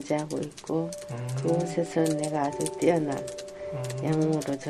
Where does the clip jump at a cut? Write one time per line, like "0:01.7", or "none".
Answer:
none